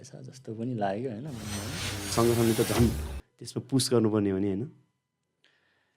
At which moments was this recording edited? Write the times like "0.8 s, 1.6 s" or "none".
2.1 s